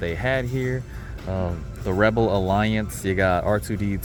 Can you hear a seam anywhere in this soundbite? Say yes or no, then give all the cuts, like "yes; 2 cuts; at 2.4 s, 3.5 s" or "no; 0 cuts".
no; 0 cuts